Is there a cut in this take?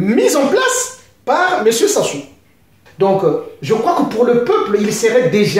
yes; 1 cut; at 2.8 s

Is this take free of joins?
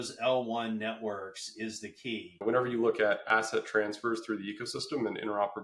no; 1 cut; at 2.4 s

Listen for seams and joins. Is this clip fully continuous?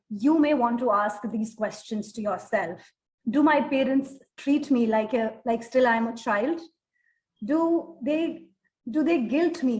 yes; 0 cuts

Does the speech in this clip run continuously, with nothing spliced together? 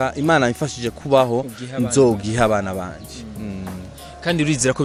yes; 0 cuts

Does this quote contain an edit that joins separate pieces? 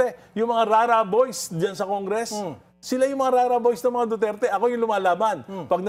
no; 0 cuts

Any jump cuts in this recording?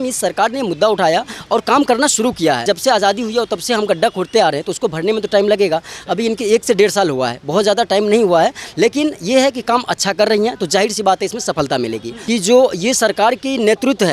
yes; 2 cuts; at 2.6 s, 12.1 s

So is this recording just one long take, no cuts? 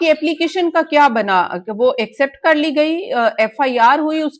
yes; 0 cuts

